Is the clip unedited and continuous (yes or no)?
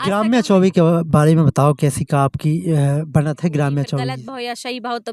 no